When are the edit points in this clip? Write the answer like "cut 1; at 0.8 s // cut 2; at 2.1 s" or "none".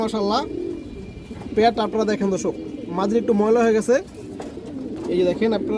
none